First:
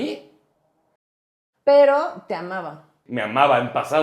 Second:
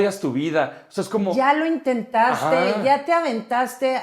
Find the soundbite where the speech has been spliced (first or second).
first